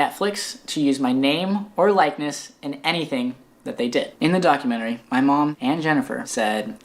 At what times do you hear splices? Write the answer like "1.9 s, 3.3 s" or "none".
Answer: 4.1 s